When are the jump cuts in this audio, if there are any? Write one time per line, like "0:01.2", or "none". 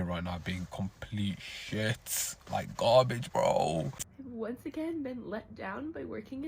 0:04.0